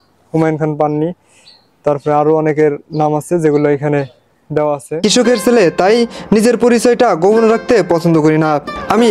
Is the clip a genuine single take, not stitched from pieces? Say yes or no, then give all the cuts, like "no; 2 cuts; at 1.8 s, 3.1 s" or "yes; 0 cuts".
no; 1 cut; at 5.0 s